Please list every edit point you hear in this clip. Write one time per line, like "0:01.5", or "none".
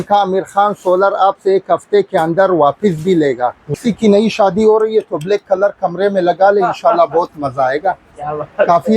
0:03.7